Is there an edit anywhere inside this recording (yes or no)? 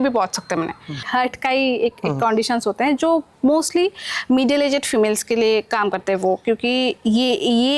yes